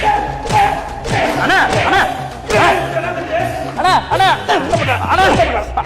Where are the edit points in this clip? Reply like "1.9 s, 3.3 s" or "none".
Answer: 3.7 s

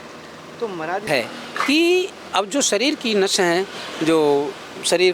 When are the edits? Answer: 1.1 s

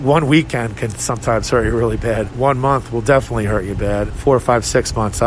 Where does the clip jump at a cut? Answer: 2.3 s, 4.1 s

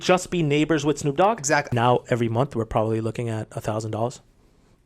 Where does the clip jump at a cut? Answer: 1.7 s

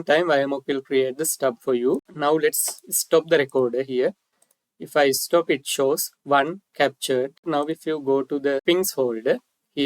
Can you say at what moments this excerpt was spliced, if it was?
2.1 s, 7.5 s, 8.6 s

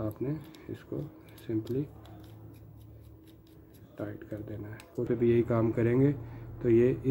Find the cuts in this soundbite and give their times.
5.1 s

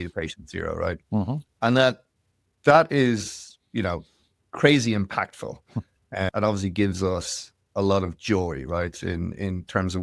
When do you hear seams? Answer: none

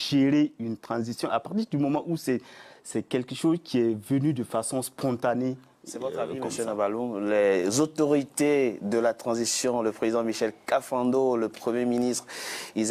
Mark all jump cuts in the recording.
none

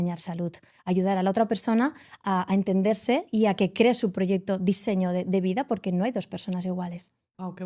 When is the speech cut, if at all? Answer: none

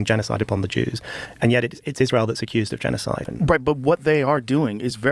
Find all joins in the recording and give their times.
3.3 s

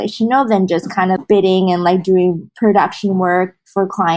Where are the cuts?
1.2 s, 2.5 s

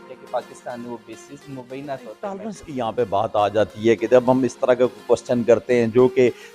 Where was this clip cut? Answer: 2.5 s

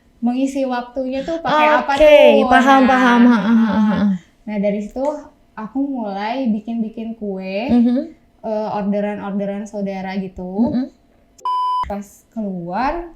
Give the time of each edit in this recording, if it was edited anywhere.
11.7 s

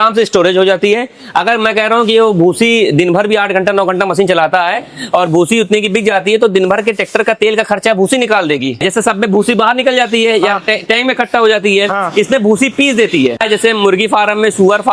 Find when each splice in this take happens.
8.8 s, 13.4 s

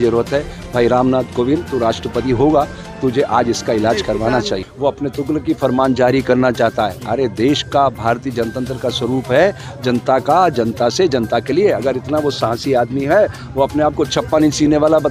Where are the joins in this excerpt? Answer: 4.7 s

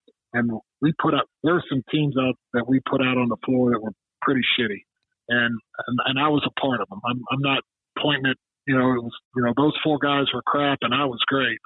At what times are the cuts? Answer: 1.3 s, 2.4 s

